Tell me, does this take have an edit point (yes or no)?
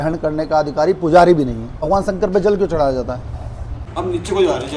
yes